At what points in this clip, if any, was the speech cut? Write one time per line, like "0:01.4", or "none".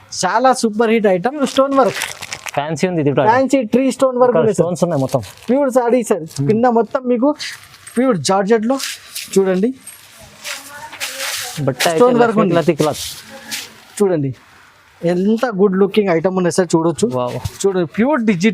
0:01.4
0:14.8